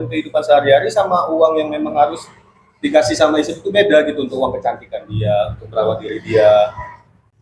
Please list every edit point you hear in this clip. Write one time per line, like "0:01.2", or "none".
none